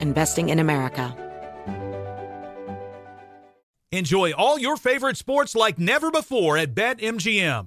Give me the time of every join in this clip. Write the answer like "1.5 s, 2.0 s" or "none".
1.1 s